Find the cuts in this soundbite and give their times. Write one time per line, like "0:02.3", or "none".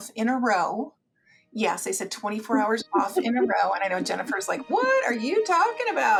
none